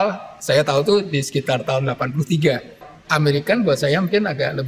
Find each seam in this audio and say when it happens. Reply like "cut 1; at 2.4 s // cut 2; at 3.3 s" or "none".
cut 1; at 2.9 s